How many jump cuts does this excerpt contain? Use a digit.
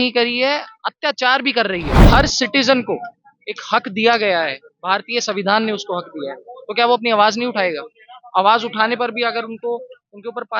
1